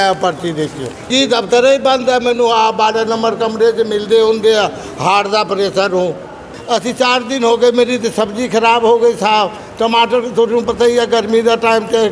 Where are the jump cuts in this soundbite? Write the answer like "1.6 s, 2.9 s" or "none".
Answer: 1.1 s, 6.5 s